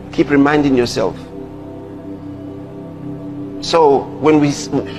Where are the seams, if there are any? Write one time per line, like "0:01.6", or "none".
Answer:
none